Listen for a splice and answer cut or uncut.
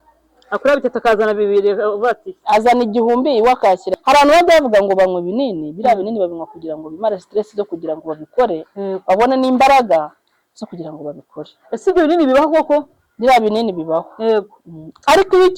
cut